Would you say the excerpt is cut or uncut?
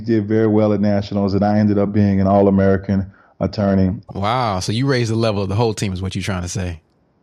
cut